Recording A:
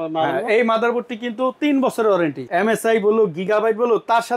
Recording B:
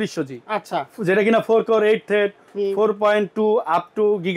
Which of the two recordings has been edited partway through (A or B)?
A